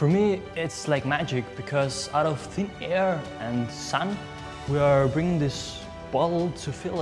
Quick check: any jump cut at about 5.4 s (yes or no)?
no